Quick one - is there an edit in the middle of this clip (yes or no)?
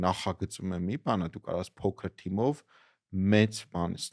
no